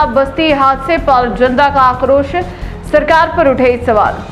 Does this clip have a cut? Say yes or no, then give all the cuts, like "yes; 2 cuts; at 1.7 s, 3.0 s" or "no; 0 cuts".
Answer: no; 0 cuts